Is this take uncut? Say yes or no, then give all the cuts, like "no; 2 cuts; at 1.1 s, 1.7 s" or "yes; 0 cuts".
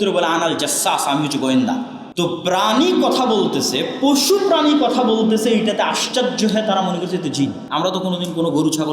no; 2 cuts; at 2.0 s, 7.6 s